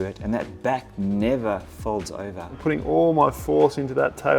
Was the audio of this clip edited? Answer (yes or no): yes